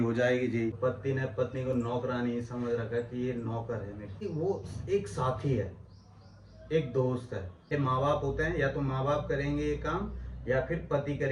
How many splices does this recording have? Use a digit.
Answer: 3